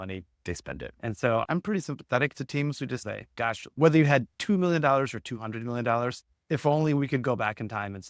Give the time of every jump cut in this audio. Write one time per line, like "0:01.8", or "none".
0:01.5
0:03.3